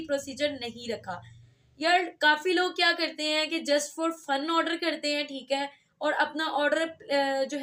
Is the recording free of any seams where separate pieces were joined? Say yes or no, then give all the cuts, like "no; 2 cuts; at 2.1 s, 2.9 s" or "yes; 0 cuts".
yes; 0 cuts